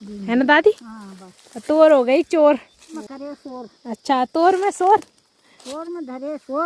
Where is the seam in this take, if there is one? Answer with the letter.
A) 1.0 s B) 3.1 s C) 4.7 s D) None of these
B